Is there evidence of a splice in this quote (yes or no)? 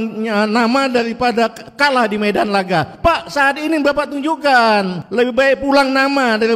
yes